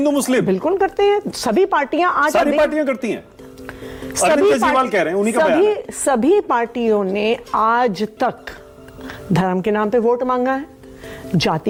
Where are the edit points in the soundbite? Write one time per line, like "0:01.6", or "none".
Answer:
none